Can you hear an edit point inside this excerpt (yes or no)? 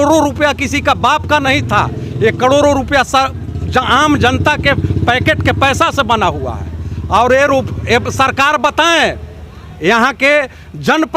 no